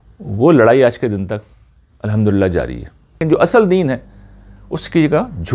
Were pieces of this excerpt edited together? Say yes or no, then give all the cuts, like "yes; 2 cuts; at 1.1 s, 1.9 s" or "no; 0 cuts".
yes; 1 cut; at 3.2 s